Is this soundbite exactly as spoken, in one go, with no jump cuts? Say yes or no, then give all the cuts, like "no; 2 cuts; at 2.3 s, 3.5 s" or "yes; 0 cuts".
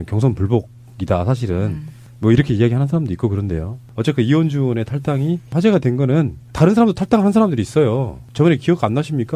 yes; 0 cuts